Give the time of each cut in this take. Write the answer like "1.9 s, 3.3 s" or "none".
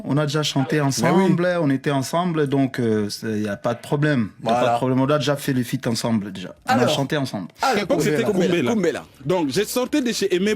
7.8 s